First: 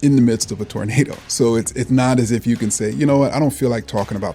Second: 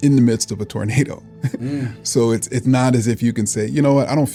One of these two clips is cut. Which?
first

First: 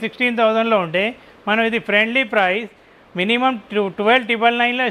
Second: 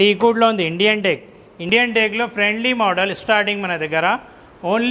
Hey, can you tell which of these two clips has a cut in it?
second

